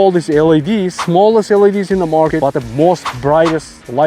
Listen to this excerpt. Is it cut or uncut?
cut